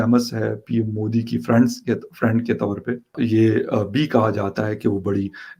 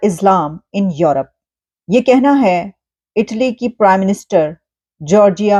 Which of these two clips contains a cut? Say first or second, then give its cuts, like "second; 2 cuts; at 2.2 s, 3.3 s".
first; 1 cut; at 3.2 s